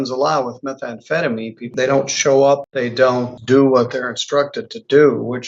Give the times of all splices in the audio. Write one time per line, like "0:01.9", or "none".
0:01.7
0:03.2